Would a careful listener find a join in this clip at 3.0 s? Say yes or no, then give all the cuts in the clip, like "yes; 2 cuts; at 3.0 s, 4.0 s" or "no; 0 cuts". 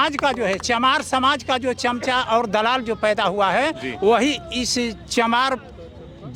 no; 0 cuts